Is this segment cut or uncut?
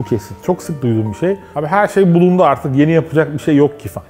uncut